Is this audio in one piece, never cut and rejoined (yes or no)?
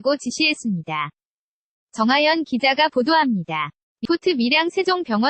no